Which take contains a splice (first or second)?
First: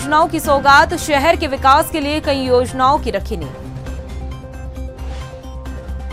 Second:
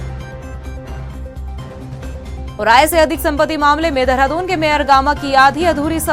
second